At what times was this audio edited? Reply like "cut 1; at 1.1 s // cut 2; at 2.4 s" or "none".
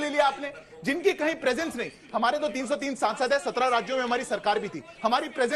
none